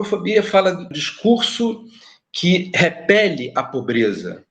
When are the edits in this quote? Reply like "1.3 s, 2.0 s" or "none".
0.9 s